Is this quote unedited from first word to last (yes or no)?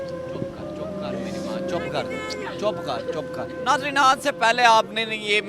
no